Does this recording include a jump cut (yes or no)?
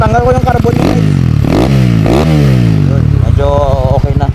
no